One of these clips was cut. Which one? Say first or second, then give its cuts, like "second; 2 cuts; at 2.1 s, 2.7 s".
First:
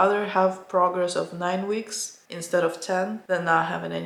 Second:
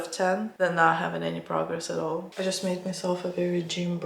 second; 1 cut; at 2.3 s